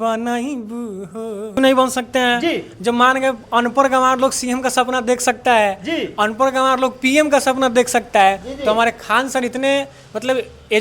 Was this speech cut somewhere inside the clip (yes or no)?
yes